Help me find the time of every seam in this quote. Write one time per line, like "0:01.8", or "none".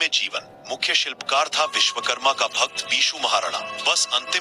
0:03.5